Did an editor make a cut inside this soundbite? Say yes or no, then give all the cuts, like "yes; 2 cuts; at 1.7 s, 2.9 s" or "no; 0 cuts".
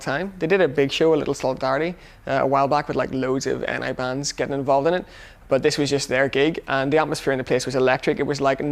yes; 1 cut; at 4.1 s